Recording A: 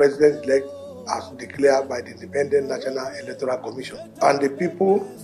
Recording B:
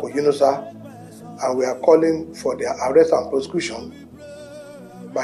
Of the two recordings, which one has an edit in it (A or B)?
A